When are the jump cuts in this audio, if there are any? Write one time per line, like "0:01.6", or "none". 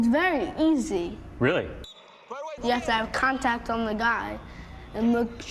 none